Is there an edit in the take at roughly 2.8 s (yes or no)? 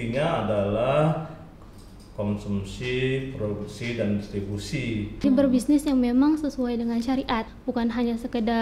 no